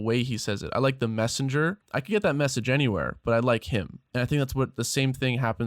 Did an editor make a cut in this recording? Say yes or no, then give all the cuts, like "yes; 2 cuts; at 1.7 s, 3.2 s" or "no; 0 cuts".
yes; 2 cuts; at 1.9 s, 4.0 s